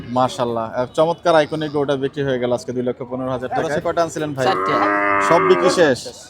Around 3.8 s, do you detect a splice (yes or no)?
yes